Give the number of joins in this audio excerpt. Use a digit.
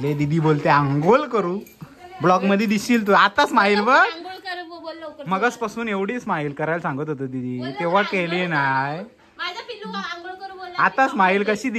0